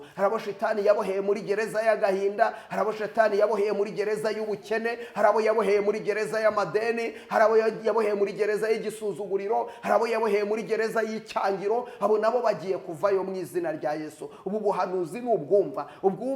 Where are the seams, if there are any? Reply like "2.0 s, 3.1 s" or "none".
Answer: none